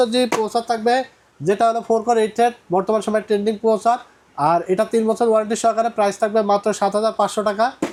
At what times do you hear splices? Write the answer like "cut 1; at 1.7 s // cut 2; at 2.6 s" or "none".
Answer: none